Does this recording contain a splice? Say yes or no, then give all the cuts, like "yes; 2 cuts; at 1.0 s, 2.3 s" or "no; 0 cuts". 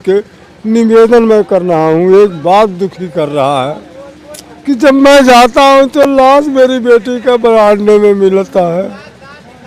no; 0 cuts